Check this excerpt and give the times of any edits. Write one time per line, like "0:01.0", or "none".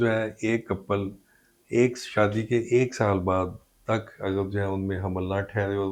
none